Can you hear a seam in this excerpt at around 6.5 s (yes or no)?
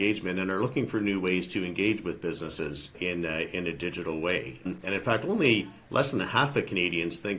no